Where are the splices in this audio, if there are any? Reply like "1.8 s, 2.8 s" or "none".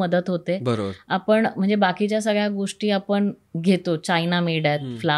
none